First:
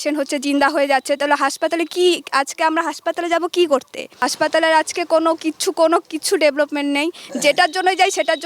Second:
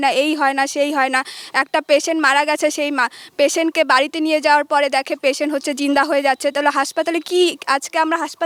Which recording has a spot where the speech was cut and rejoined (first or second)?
first